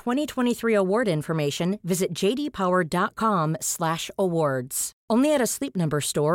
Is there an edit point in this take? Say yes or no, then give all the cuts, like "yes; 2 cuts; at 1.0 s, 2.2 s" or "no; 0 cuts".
no; 0 cuts